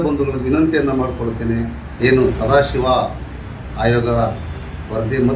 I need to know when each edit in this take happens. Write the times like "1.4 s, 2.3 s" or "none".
1.8 s